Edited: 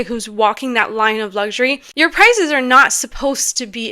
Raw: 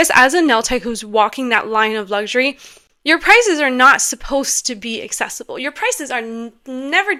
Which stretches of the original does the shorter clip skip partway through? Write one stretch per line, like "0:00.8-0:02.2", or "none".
0:02.6-0:02.9